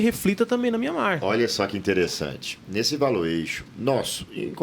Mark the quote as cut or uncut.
cut